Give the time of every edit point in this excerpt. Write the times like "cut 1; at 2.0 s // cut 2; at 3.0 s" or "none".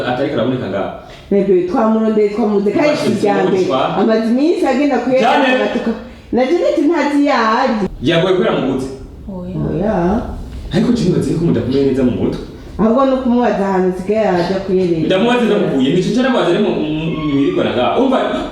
cut 1; at 7.9 s